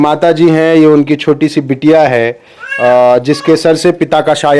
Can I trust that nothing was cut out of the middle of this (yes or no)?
yes